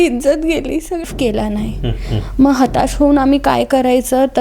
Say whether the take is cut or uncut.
cut